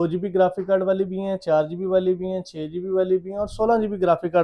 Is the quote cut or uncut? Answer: uncut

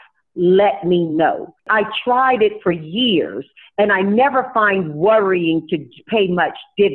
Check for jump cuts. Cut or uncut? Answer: cut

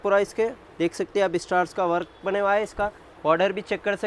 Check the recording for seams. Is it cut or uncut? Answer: uncut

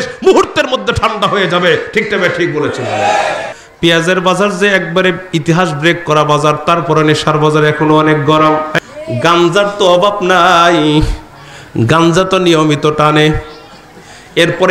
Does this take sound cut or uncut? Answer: cut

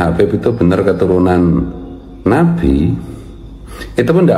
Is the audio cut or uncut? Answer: uncut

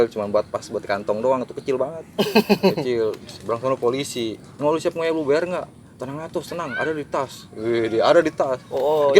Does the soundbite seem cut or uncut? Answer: uncut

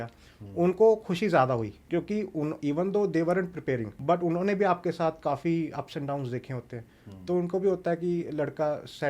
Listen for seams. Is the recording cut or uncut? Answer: cut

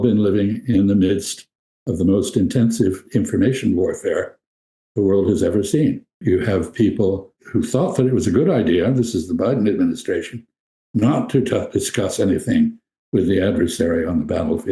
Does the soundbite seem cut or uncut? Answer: cut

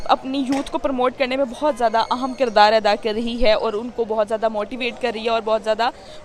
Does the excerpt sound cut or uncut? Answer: uncut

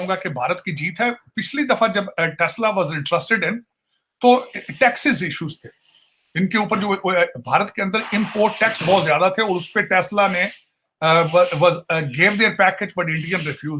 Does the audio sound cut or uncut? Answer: uncut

